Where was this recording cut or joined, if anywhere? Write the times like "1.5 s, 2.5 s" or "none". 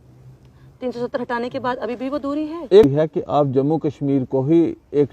2.8 s